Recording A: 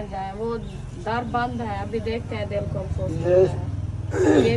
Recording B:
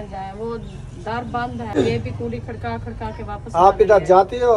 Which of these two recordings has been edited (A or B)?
B